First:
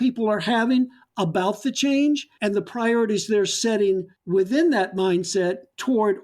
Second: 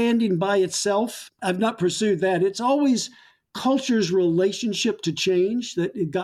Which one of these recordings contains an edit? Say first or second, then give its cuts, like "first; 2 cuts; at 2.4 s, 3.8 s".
first; 2 cuts; at 2.3 s, 4.1 s